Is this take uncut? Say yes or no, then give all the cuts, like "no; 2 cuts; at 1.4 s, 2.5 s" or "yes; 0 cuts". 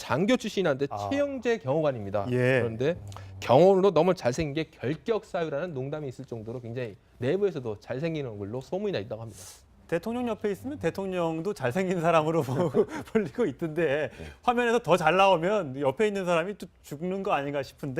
no; 1 cut; at 6.1 s